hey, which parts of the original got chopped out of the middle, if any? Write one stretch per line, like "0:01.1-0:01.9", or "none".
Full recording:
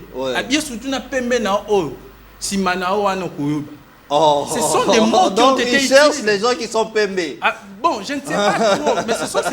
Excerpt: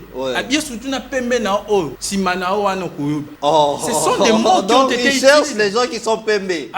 0:02.0-0:02.4
0:03.7-0:04.0